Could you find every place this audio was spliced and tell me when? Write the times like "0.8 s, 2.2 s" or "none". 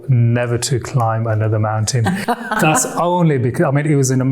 none